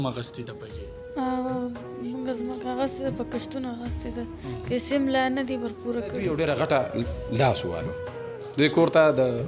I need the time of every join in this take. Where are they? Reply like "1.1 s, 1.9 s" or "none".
6.2 s